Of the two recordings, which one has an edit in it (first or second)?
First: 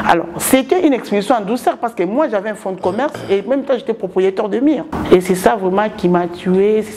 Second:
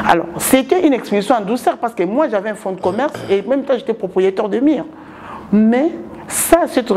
first